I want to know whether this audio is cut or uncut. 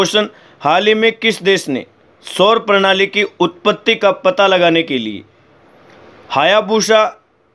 uncut